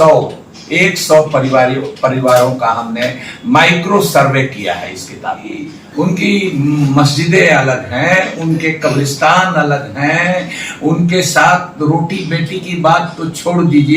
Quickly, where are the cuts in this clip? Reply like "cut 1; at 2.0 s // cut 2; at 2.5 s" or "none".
cut 1; at 5.8 s